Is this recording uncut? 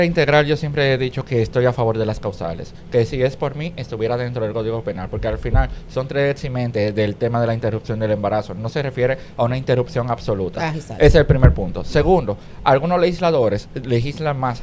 yes; 0 cuts

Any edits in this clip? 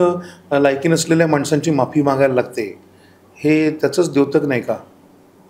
no; 0 cuts

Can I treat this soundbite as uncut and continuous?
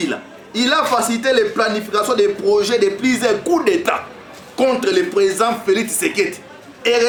yes; 0 cuts

